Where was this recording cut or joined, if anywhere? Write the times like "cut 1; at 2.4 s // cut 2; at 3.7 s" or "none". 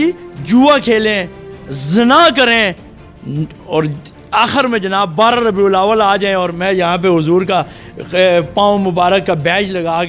none

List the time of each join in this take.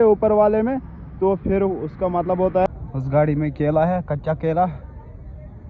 cut 1; at 2.7 s

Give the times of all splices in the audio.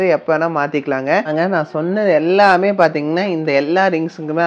cut 1; at 1.3 s

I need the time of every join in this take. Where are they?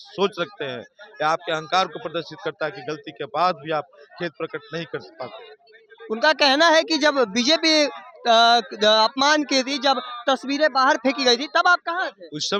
none

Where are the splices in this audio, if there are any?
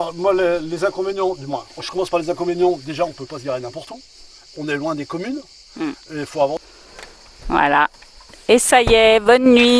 cut 1; at 6.6 s

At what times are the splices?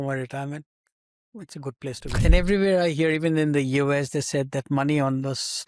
cut 1; at 2.1 s

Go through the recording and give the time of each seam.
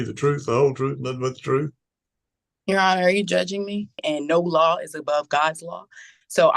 cut 1; at 4.0 s

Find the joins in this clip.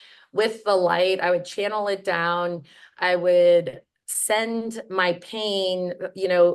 none

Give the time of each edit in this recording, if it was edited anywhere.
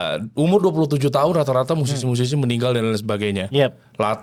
none

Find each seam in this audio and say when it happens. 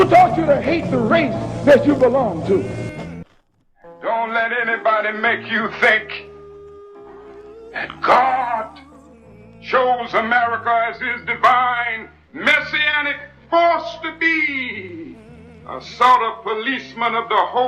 cut 1; at 3.2 s

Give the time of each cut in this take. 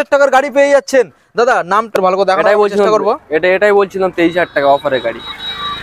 cut 1; at 2.0 s

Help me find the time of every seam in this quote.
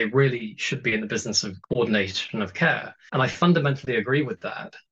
cut 1; at 1.5 s // cut 2; at 2.9 s

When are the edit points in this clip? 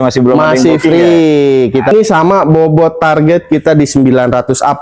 cut 1; at 1.9 s

